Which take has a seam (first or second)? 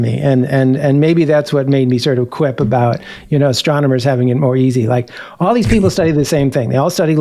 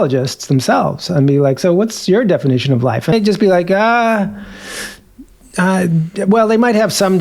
second